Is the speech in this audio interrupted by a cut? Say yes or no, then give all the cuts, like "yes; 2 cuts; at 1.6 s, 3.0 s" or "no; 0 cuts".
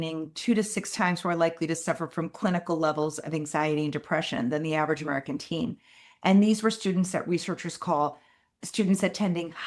yes; 1 cut; at 8.5 s